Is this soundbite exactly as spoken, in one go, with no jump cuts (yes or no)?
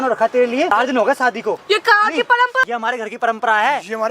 no